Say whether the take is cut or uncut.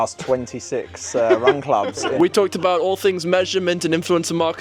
cut